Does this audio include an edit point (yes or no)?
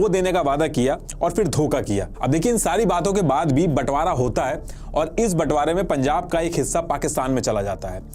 no